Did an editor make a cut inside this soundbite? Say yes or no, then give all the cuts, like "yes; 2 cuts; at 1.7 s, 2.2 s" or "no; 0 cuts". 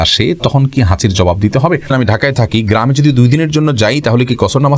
yes; 1 cut; at 1.9 s